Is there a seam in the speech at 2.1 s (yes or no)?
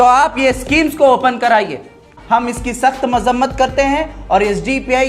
yes